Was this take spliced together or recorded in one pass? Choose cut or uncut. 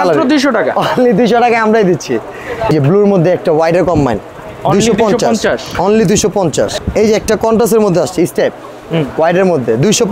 cut